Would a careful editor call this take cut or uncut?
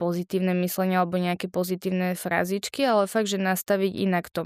uncut